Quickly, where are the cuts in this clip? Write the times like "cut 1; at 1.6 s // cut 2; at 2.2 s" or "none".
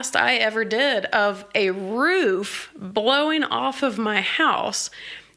none